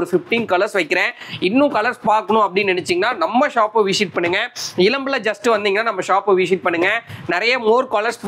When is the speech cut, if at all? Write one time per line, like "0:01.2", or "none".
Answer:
none